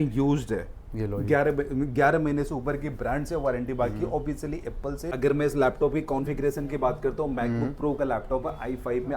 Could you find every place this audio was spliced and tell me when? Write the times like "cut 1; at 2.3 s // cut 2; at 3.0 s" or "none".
cut 1; at 5.1 s